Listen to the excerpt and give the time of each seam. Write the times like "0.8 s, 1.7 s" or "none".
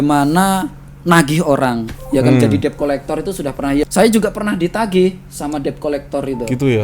3.8 s